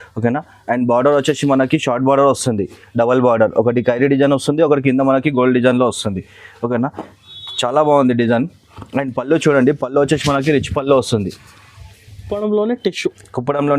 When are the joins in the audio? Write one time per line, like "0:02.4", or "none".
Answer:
0:12.3

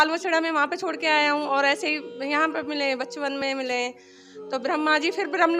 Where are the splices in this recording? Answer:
none

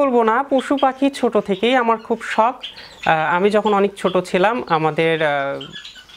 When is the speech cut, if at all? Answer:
none

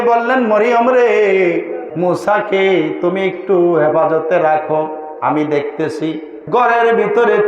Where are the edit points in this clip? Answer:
0:01.8
0:06.3

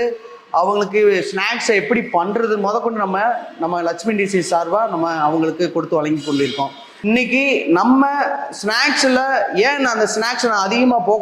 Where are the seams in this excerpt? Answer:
0:06.9

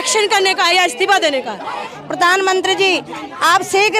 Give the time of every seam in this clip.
0:01.9

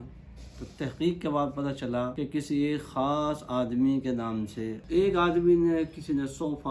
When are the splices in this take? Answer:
0:02.1
0:04.8

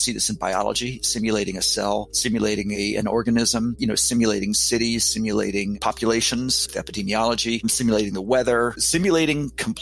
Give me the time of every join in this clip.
none

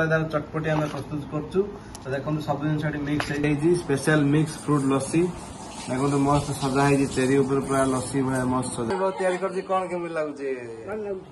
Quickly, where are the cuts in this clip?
0:03.5
0:08.9

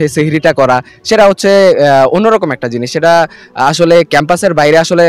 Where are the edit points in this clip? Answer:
none

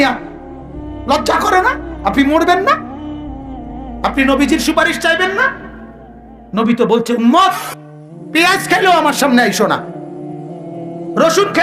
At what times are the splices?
none

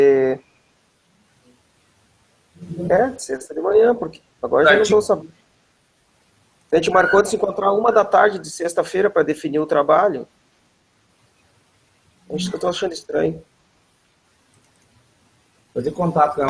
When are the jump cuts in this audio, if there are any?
none

